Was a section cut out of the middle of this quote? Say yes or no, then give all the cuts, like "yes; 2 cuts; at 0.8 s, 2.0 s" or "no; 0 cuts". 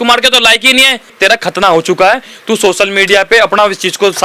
yes; 1 cut; at 1.1 s